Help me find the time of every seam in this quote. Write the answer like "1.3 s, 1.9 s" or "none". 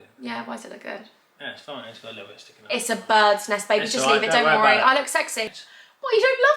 5.6 s